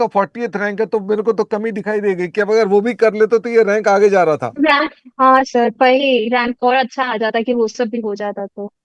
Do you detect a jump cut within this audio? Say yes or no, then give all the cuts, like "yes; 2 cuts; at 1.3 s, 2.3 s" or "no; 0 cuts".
no; 0 cuts